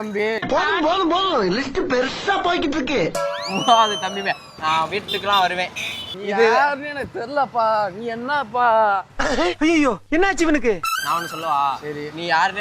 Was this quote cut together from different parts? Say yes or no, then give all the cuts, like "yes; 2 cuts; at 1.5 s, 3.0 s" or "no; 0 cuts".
yes; 2 cuts; at 6.1 s, 10.9 s